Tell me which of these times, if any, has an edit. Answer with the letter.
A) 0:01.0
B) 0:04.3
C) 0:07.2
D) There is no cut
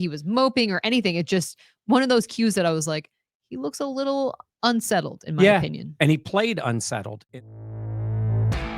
C